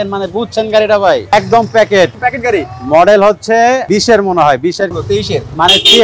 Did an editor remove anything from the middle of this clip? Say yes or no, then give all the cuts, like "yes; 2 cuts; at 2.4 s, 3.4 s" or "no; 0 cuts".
yes; 4 cuts; at 1.3 s, 2.2 s, 3.8 s, 5.0 s